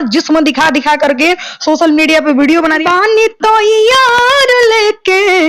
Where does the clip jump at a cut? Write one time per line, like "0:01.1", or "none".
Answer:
0:02.8